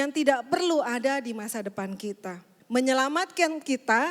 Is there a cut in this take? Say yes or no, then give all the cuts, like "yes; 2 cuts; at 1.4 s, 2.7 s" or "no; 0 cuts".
yes; 1 cut; at 2.5 s